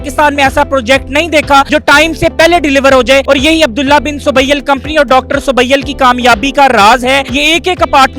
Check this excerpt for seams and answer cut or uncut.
cut